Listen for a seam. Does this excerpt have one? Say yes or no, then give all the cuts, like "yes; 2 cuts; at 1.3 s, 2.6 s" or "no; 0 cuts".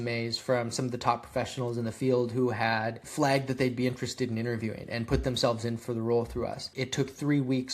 yes; 2 cuts; at 3.0 s, 6.7 s